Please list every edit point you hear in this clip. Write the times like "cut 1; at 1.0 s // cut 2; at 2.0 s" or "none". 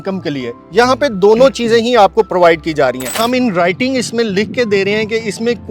cut 1; at 3.2 s

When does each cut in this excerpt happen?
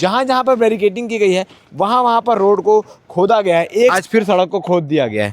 cut 1; at 3.9 s

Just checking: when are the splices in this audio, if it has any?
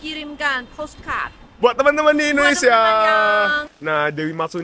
cut 1; at 3.7 s

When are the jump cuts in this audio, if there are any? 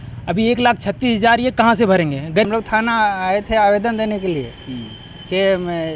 cut 1; at 2.4 s

